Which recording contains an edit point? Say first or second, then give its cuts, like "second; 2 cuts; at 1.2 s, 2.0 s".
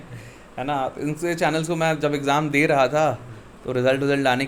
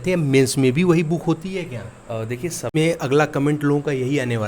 second; 1 cut; at 2.6 s